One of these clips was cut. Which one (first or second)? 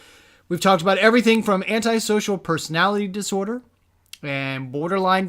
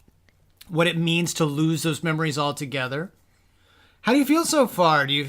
second